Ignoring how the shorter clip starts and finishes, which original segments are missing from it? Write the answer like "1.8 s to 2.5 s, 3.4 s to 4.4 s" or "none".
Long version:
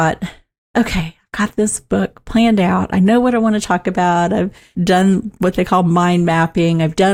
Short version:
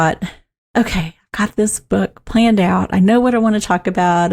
none